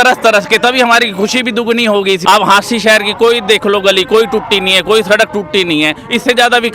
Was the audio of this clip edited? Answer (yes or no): yes